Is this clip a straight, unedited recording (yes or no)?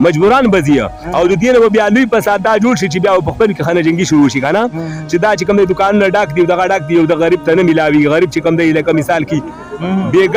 yes